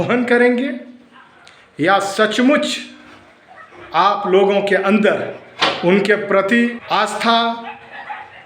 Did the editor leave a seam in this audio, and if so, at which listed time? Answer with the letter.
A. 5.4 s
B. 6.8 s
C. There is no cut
B